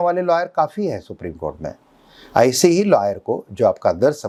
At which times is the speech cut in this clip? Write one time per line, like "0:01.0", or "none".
none

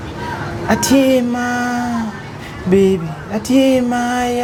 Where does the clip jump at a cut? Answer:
none

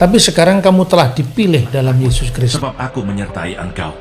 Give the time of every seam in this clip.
0:02.5

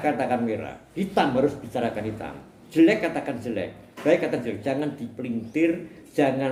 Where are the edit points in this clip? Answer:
none

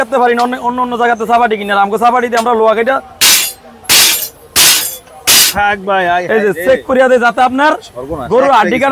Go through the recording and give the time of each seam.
none

